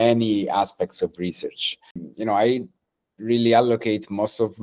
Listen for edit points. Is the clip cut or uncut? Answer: cut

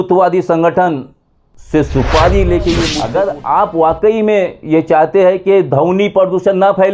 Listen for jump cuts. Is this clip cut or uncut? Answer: cut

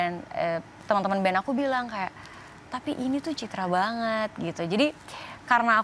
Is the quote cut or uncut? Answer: uncut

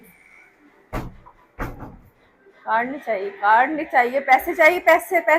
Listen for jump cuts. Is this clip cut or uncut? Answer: uncut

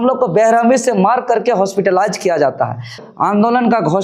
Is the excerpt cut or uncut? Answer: cut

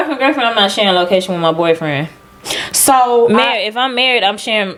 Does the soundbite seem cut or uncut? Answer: uncut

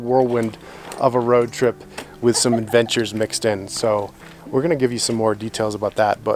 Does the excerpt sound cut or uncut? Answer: uncut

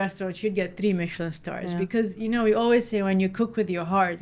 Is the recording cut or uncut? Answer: uncut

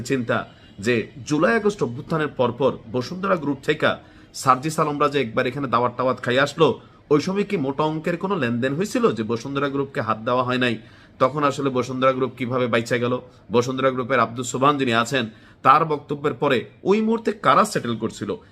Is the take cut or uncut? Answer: uncut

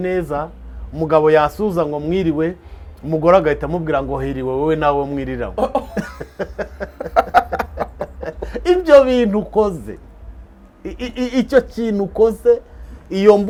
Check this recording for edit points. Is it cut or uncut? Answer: uncut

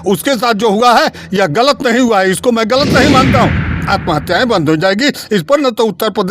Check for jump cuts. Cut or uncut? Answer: cut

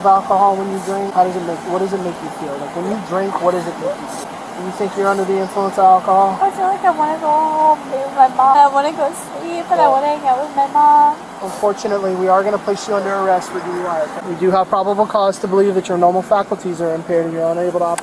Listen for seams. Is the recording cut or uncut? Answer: cut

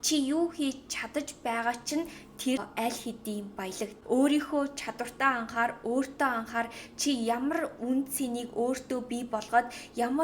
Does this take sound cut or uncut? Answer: cut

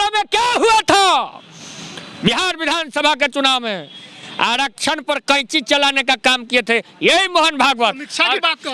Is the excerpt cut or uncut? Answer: uncut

